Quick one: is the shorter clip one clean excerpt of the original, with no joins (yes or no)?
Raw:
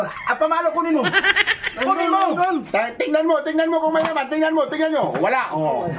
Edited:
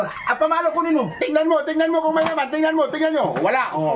no